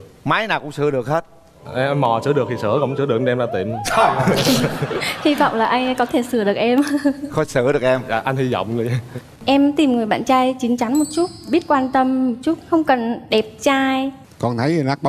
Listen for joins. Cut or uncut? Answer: cut